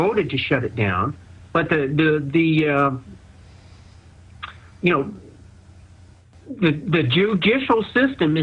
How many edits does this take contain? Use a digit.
1